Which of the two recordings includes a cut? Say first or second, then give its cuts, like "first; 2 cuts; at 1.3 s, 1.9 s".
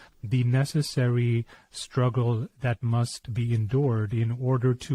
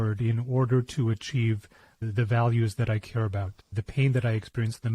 second; 2 cuts; at 2.0 s, 3.6 s